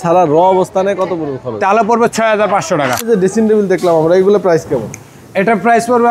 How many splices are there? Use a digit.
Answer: 1